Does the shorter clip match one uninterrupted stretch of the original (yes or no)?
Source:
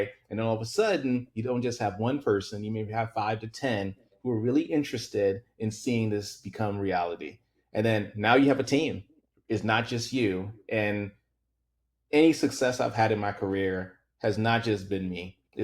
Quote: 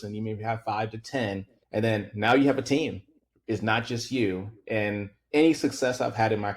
no